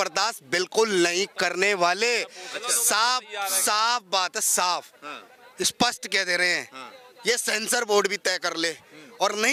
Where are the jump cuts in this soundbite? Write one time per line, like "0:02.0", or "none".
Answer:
none